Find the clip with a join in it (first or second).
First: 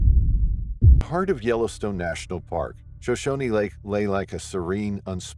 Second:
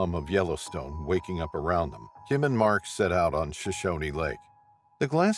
first